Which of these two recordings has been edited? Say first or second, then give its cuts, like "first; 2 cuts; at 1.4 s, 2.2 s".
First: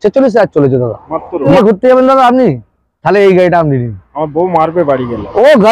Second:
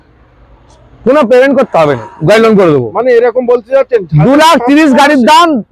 first; 1 cut; at 1.5 s